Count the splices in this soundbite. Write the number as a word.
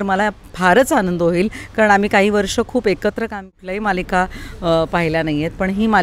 one